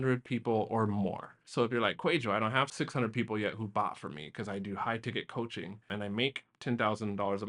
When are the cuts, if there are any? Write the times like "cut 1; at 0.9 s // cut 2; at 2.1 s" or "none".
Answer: cut 1; at 2.7 s